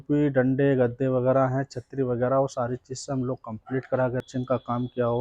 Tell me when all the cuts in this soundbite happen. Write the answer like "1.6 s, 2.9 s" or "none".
4.3 s